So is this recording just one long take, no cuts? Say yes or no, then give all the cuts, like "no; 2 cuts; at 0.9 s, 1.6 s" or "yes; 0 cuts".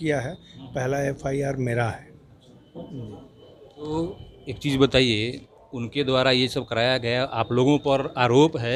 yes; 0 cuts